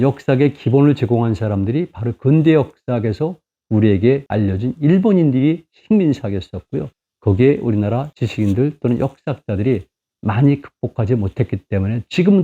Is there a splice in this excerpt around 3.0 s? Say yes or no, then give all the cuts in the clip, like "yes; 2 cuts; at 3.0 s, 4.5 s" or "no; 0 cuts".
no; 0 cuts